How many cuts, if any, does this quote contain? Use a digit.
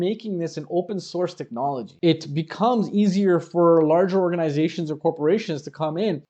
1